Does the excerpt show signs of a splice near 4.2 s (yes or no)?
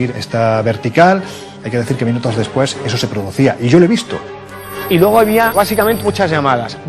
yes